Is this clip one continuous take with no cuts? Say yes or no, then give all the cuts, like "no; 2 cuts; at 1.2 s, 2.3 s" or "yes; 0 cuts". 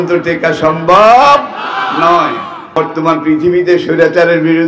no; 1 cut; at 2.8 s